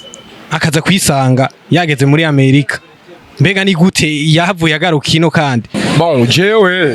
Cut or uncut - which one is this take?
cut